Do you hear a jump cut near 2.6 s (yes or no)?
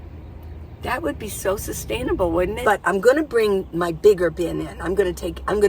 yes